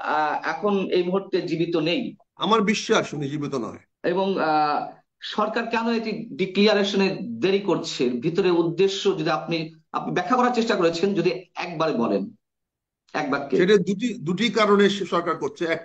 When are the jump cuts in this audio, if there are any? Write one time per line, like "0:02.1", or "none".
0:02.2
0:03.8